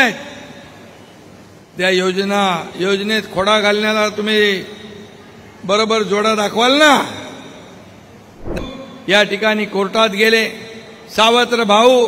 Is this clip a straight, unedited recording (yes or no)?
no